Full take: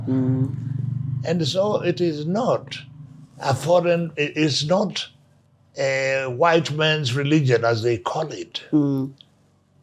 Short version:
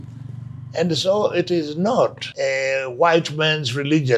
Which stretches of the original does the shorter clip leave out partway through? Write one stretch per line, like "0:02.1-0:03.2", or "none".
0:02.7-0:05.7